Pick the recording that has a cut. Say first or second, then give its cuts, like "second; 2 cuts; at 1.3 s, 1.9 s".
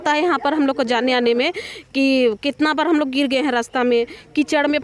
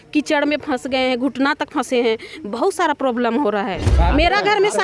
second; 1 cut; at 3.9 s